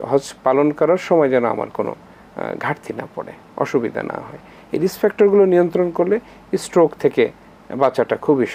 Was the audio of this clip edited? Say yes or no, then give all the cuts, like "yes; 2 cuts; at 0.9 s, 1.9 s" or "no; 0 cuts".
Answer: no; 0 cuts